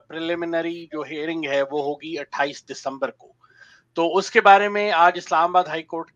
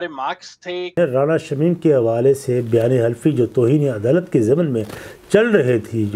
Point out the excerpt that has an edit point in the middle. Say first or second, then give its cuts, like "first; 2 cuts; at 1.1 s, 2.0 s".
second; 1 cut; at 1.0 s